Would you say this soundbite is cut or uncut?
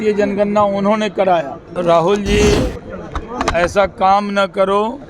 cut